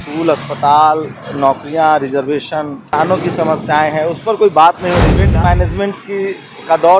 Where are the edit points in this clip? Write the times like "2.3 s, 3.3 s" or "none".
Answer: 2.9 s, 5.2 s